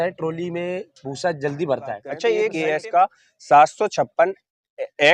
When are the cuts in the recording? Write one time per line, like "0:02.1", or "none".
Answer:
0:02.5